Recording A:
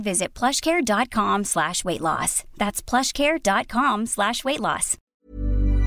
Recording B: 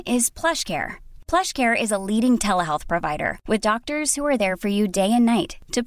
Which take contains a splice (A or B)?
A